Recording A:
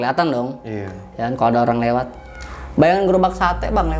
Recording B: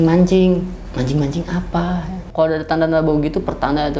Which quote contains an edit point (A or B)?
B